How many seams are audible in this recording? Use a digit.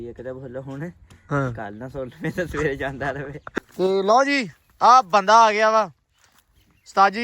1